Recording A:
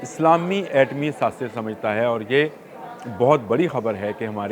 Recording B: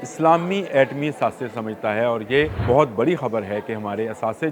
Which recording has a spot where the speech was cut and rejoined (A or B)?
B